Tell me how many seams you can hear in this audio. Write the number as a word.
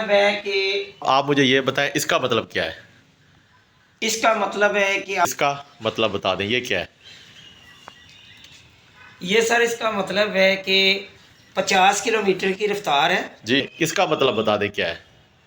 three